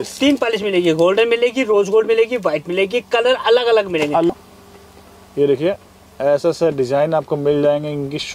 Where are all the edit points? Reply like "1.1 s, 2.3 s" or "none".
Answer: 4.3 s